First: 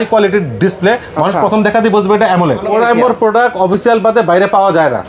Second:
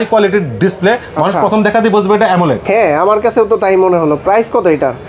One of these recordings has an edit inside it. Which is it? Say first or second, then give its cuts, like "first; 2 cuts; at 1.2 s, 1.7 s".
first; 1 cut; at 2.6 s